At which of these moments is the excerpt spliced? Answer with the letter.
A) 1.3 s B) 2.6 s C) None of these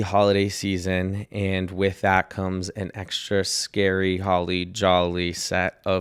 C